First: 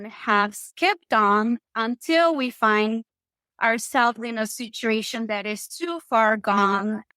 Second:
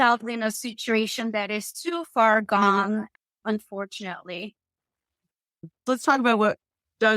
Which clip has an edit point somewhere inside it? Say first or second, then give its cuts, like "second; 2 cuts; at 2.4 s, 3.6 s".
second; 1 cut; at 5.8 s